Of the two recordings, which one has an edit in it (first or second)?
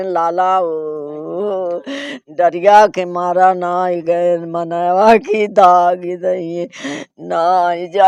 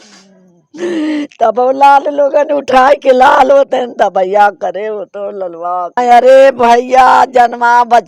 second